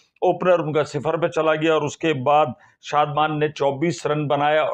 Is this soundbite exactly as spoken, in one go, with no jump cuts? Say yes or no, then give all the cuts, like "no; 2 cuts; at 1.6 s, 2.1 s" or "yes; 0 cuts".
yes; 0 cuts